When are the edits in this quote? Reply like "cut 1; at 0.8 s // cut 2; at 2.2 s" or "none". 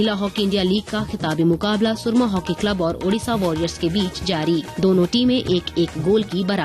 cut 1; at 4.7 s